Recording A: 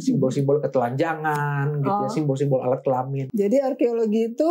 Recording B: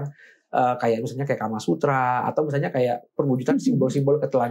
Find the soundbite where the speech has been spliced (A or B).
A